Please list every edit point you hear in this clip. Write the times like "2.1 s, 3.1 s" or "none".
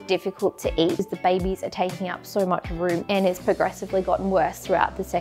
1.1 s, 3.0 s